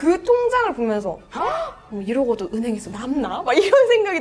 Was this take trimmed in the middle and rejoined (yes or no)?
no